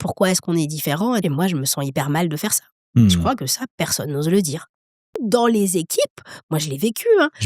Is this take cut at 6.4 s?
no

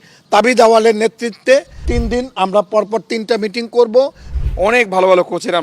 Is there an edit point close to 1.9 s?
yes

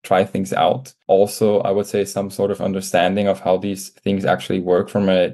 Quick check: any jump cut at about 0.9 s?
yes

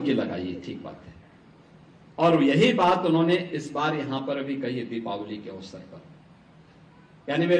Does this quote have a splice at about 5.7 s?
no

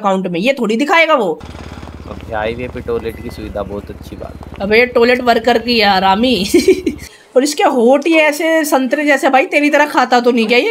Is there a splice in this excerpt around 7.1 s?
yes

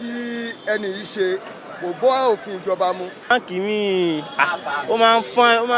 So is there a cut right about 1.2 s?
no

